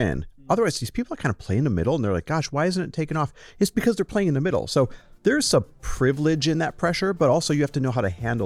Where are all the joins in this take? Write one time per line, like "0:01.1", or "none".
none

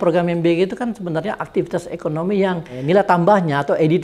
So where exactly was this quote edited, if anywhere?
0:02.8

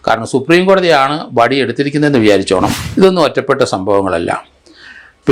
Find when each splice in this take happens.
0:02.8

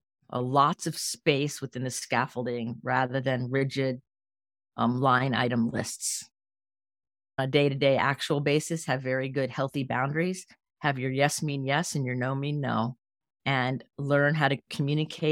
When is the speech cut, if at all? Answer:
0:07.4

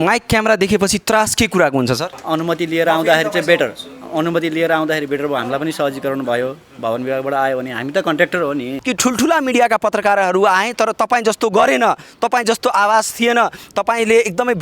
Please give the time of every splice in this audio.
0:02.1
0:08.7

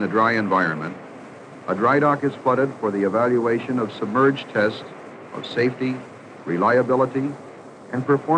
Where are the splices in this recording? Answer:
none

